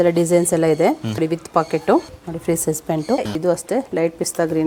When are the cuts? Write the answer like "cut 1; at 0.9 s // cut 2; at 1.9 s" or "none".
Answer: cut 1; at 2.1 s // cut 2; at 3.3 s